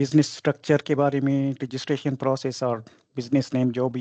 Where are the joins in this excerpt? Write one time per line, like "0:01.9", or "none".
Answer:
none